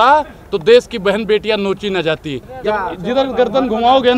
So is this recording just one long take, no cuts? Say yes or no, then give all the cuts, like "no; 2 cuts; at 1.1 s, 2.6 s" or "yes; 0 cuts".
no; 1 cut; at 2.4 s